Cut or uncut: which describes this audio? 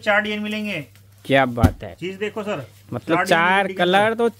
uncut